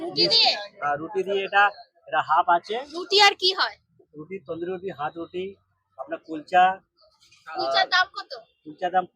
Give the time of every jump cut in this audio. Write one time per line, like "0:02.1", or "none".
none